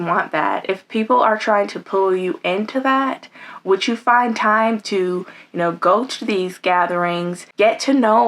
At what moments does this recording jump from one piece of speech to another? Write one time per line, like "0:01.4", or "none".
0:07.4